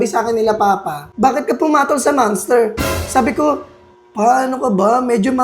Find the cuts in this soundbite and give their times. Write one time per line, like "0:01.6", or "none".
0:01.0